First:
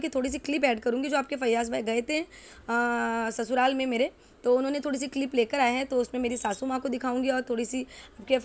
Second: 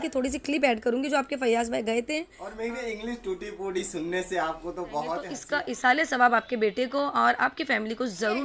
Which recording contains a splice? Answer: second; 2 cuts; at 2.4 s, 5.3 s

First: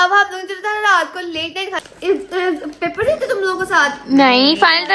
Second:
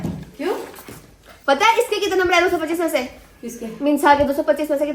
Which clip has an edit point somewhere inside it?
first; 1 cut; at 1.8 s

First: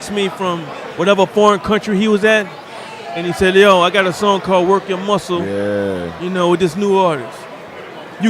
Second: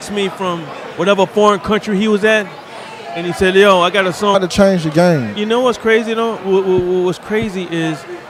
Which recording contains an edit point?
first; 1 cut; at 4.3 s

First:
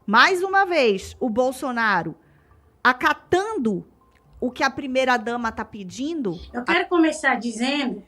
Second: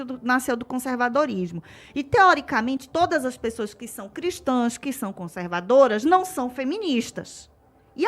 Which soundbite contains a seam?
first; 1 cut; at 6.5 s

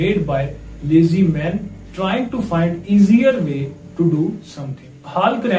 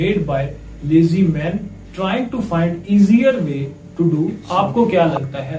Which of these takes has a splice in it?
second; 1 cut; at 4.4 s

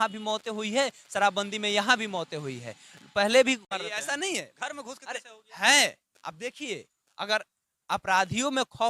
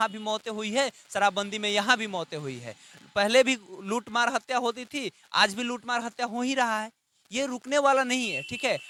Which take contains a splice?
first; 1 cut; at 3.7 s

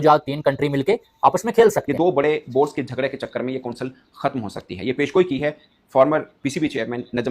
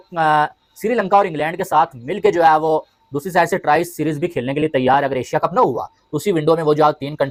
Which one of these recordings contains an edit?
first; 1 cut; at 1.8 s

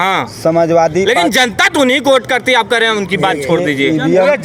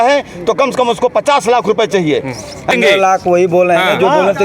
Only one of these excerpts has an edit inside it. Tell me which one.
second; 1 cut; at 2.7 s

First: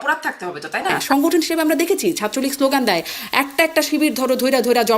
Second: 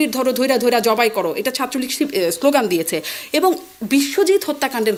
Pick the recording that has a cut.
first; 1 cut; at 1.0 s

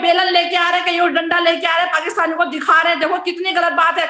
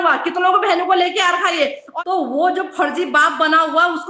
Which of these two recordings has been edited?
second; 1 cut; at 1.8 s

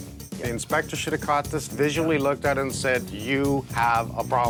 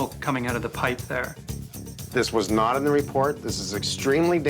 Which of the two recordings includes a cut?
second; 1 cut; at 1.7 s

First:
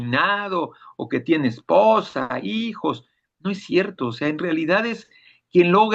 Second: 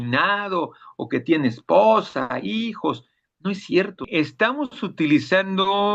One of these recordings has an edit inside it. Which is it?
second; 1 cut; at 4.1 s

